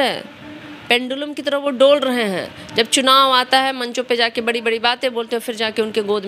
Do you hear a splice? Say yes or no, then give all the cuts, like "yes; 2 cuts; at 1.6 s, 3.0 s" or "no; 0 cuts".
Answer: no; 0 cuts